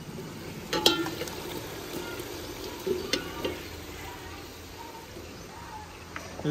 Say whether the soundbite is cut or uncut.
uncut